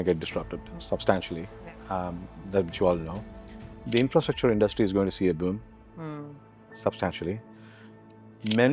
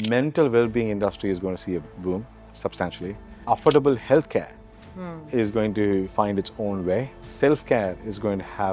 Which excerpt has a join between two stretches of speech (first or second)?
second